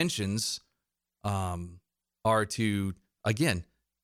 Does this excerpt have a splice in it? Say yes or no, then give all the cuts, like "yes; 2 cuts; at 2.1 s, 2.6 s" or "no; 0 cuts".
no; 0 cuts